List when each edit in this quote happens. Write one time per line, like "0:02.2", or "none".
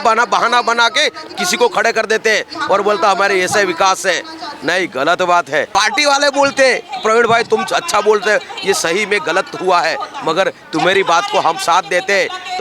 0:05.7